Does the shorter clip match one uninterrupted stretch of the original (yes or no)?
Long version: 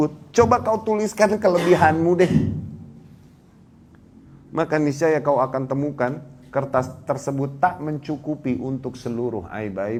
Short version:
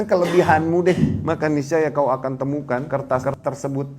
no